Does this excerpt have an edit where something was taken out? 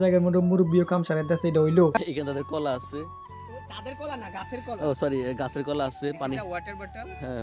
yes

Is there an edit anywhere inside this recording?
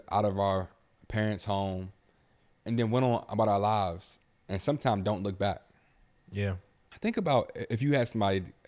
yes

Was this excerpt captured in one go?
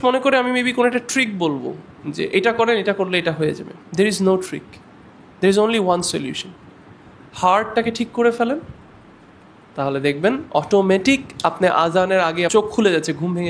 no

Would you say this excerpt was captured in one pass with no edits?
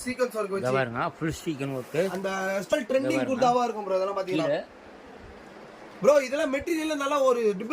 no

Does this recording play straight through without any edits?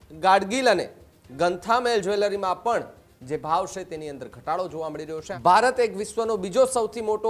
no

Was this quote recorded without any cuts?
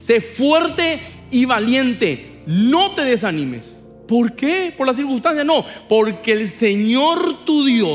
yes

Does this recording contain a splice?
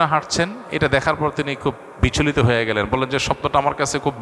no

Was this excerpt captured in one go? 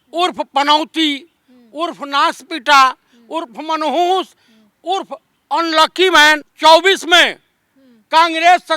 no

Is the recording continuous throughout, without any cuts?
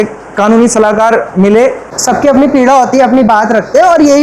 no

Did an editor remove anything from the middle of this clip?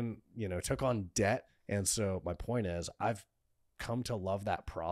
yes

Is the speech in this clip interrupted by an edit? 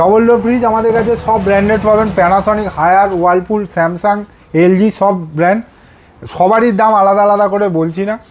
no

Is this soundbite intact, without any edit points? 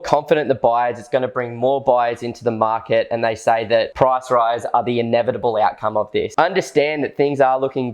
no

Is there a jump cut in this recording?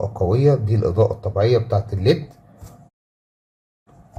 no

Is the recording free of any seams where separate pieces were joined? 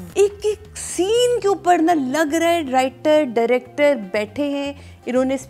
yes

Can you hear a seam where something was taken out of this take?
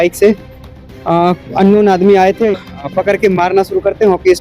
yes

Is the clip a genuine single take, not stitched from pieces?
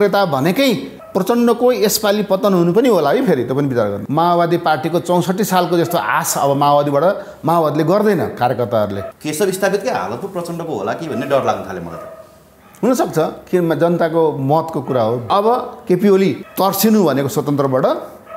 no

